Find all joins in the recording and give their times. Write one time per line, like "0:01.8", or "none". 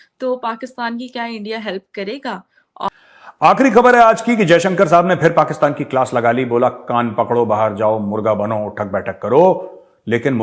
0:02.9